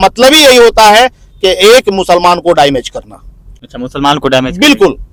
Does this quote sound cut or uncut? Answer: uncut